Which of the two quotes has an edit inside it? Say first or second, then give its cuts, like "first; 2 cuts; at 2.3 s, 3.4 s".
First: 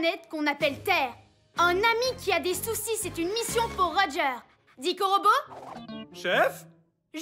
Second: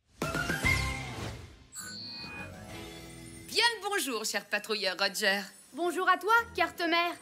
second; 1 cut; at 3.5 s